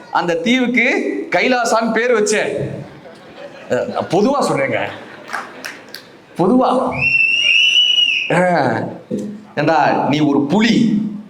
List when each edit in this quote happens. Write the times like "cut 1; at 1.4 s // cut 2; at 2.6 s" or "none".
cut 1; at 9.1 s